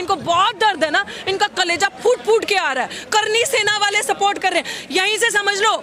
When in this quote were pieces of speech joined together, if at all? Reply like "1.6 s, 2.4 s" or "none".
none